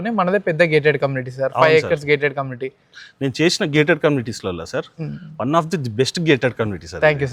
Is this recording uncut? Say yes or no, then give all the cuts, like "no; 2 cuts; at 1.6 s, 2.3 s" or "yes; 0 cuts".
yes; 0 cuts